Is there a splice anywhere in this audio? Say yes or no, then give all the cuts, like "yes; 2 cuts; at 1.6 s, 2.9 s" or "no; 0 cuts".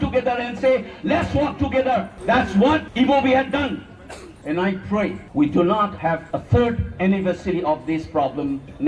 yes; 2 cuts; at 4.4 s, 6.3 s